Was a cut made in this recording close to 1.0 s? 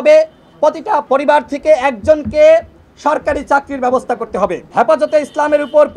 yes; 2 cuts; at 1.0 s, 4.6 s

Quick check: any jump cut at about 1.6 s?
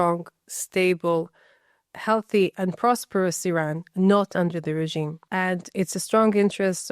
no; 1 cut; at 5.2 s

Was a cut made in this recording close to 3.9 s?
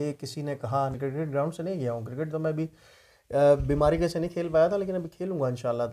no; 1 cut; at 1.0 s

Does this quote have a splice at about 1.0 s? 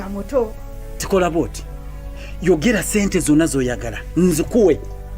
yes; 1 cut; at 1.0 s

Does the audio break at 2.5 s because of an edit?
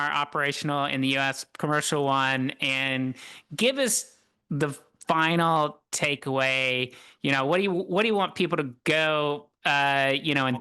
no; 0 cuts

